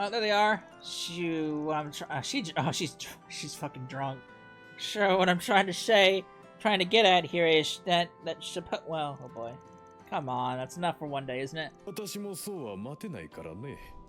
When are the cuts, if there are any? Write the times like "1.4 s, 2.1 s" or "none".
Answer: 11.9 s